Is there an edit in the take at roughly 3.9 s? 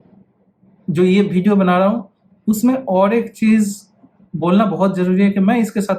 no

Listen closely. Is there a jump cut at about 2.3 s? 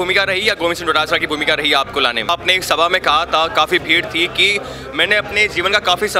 yes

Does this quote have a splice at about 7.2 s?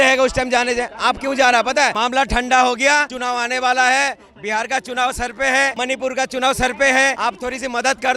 yes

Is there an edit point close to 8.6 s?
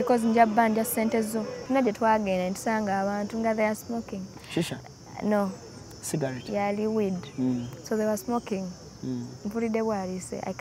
no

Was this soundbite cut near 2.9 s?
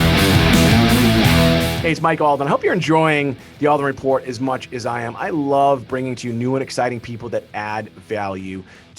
no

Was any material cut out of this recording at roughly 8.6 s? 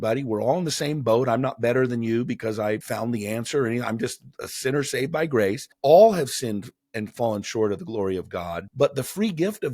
yes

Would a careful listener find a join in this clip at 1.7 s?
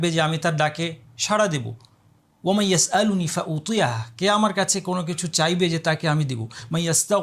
no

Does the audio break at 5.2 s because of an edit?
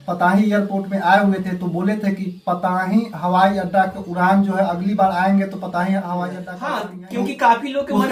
no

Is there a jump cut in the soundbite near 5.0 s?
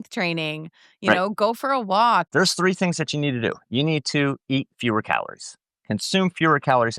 no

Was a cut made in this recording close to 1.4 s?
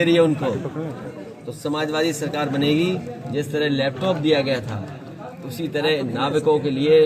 no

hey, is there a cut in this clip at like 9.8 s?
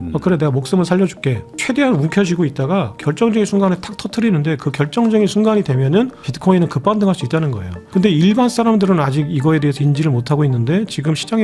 yes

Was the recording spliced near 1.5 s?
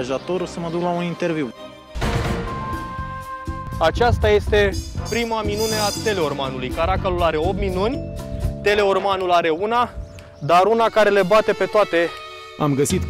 yes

